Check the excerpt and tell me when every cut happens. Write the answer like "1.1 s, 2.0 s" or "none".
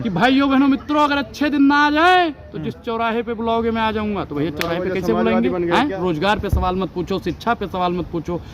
6.0 s

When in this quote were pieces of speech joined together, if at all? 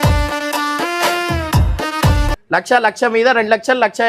2.3 s

